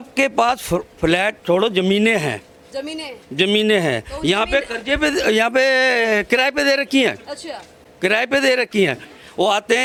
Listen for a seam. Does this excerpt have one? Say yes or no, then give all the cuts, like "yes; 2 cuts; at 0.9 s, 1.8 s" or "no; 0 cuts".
no; 0 cuts